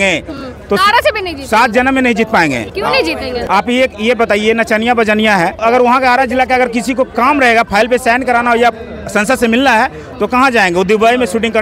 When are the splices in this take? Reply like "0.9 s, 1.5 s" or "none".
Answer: 3.0 s, 5.6 s